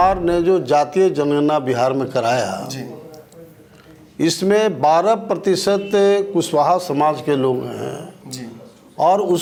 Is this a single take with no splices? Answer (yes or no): yes